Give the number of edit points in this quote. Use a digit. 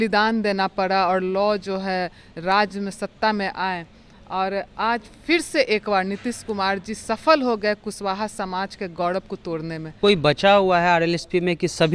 1